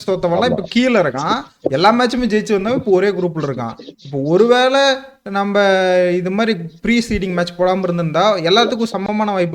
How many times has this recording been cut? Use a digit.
0